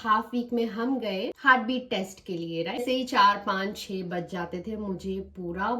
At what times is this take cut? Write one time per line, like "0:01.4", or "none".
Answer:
0:01.4
0:02.8